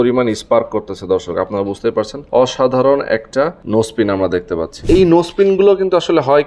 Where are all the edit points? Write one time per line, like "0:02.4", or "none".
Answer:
0:02.2
0:03.6
0:04.8